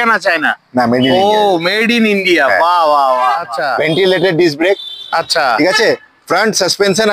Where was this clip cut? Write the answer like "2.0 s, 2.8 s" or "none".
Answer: 3.5 s